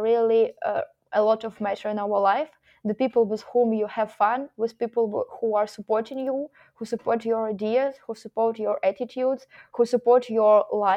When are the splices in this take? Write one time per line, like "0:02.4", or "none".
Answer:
none